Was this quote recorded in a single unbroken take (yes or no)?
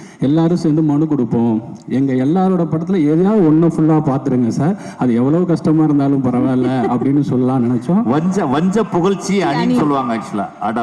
yes